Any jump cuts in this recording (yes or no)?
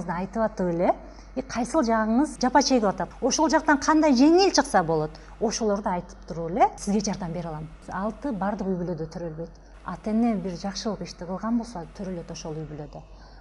yes